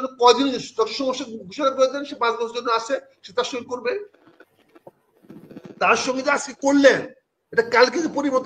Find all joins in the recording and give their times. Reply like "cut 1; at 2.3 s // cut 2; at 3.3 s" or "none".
none